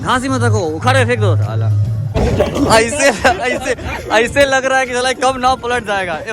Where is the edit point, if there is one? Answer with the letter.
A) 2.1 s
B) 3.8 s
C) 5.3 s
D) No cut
A